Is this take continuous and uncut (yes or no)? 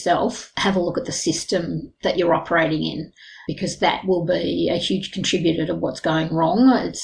yes